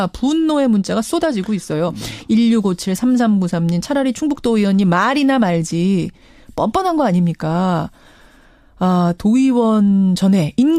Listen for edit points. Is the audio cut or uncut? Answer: uncut